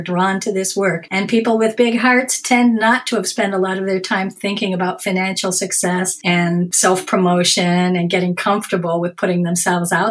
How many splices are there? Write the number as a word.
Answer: two